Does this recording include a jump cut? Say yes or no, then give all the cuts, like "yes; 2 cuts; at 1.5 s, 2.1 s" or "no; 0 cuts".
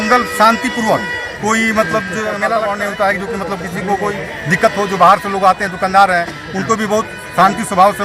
yes; 1 cut; at 2.6 s